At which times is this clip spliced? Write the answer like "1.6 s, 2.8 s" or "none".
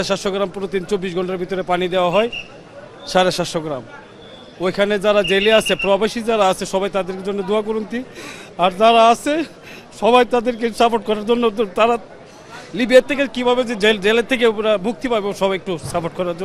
none